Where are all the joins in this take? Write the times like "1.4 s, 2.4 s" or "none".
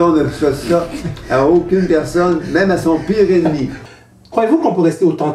3.8 s